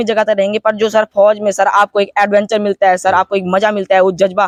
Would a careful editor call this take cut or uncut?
uncut